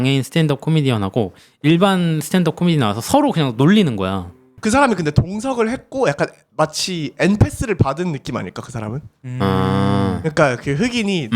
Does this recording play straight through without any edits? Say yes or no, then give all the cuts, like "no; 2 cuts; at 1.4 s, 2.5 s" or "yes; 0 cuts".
no; 1 cut; at 4.5 s